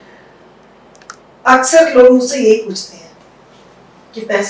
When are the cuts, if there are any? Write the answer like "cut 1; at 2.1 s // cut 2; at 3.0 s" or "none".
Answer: none